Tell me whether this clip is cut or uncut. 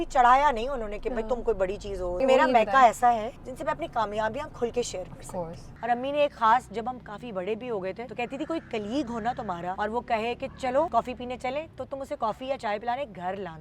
cut